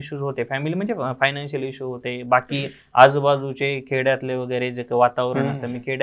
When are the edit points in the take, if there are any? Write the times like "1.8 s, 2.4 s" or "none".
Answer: none